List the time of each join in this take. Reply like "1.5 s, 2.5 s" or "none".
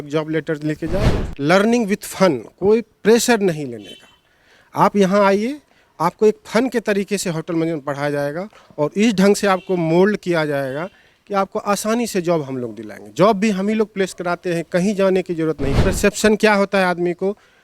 1.2 s, 15.9 s